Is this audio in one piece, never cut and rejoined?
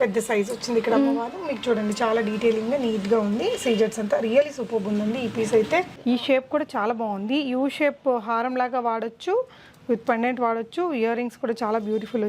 no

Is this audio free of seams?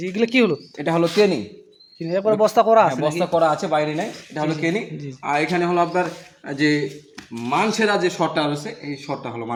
yes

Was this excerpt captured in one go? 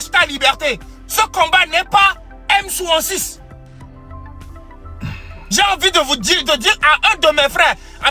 yes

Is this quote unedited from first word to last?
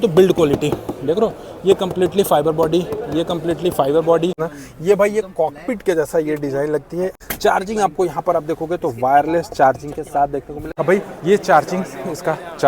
no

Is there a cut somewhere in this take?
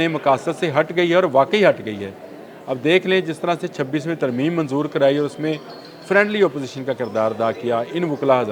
no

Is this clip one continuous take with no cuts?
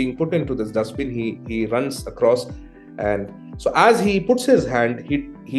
yes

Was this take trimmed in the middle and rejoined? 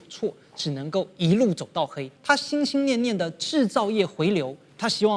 yes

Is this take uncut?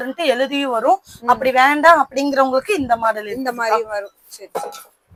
yes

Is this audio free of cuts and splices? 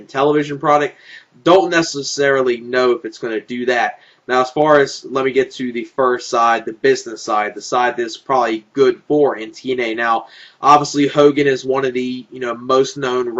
no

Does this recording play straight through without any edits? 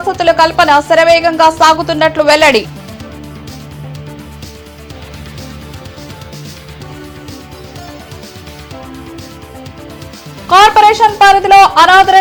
yes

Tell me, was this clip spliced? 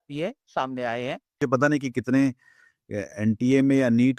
yes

